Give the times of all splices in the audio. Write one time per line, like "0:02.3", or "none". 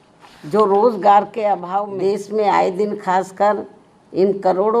0:01.7